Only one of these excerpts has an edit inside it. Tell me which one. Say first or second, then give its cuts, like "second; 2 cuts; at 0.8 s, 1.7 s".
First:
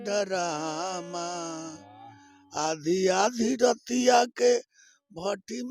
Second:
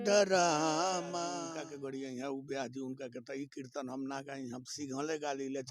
second; 1 cut; at 1.6 s